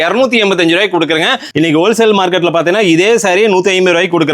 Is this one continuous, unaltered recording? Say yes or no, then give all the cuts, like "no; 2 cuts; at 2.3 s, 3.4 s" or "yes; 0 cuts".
no; 1 cut; at 1.4 s